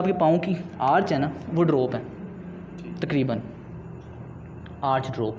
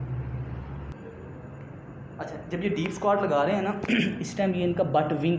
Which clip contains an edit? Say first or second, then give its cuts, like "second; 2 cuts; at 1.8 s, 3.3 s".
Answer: second; 1 cut; at 0.9 s